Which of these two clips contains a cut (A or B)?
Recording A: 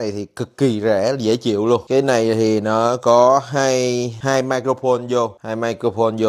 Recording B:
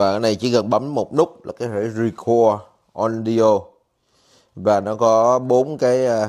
A